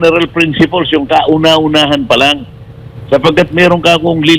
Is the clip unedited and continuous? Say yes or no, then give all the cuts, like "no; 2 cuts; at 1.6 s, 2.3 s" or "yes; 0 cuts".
yes; 0 cuts